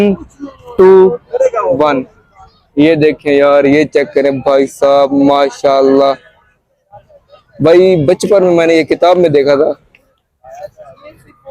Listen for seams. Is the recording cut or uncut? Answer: uncut